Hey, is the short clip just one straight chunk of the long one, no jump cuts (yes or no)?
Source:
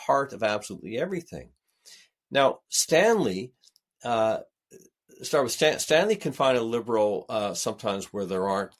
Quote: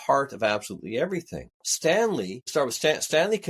no